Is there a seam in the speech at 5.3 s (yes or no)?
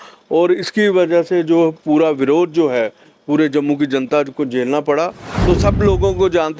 yes